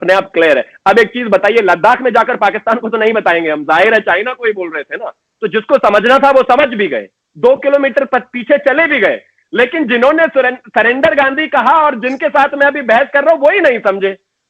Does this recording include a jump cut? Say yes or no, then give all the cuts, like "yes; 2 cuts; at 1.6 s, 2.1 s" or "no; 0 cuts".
no; 0 cuts